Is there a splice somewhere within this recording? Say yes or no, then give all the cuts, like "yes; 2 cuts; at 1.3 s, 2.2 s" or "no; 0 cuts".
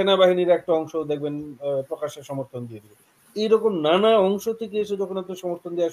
no; 0 cuts